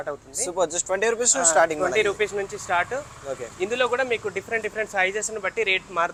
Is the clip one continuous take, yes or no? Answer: yes